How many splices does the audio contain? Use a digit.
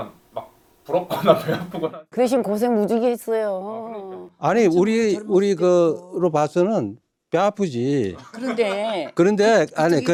0